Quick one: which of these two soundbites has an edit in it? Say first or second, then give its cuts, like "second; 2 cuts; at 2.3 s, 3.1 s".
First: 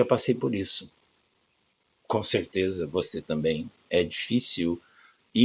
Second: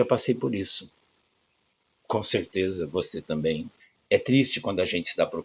second; 1 cut; at 3.7 s